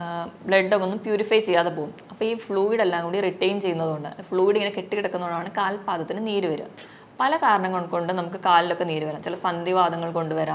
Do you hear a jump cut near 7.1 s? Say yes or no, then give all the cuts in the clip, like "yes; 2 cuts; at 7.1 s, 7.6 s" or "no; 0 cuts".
no; 0 cuts